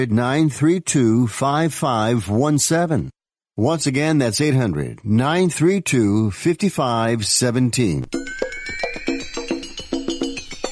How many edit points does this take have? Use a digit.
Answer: 1